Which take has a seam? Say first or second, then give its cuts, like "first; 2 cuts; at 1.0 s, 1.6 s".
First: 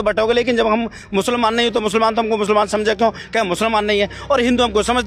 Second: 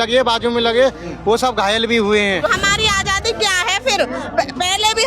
second; 1 cut; at 2.5 s